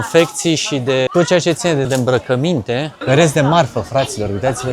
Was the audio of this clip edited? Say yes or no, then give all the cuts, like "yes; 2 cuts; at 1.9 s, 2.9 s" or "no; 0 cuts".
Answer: yes; 3 cuts; at 1.1 s, 1.9 s, 2.9 s